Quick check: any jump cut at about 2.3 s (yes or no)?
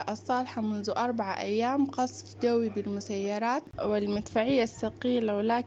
no